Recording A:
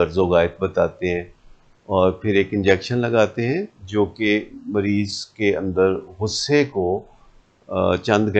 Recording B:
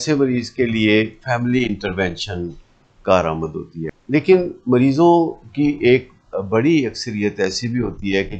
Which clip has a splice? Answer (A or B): B